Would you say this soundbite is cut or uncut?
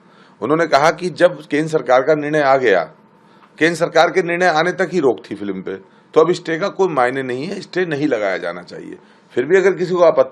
uncut